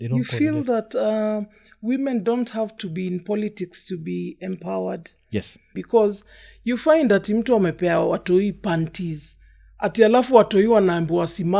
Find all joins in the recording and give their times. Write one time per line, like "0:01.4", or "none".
0:05.7